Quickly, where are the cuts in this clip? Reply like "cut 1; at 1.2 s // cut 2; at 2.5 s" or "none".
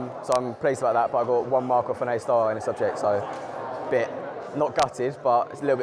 none